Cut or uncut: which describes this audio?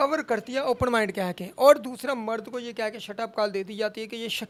uncut